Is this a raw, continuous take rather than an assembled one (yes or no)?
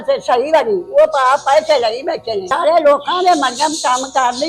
no